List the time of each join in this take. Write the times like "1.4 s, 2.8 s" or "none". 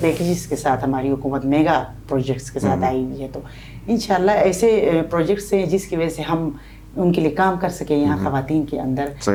none